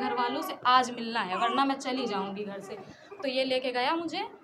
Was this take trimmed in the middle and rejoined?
no; 0 cuts

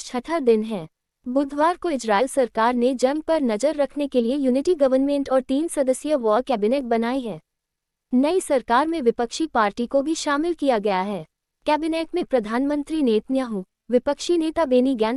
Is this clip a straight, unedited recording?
yes; 0 cuts

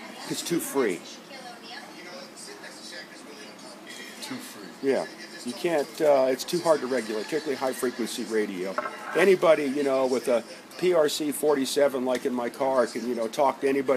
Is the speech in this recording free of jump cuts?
no; 1 cut; at 1.2 s

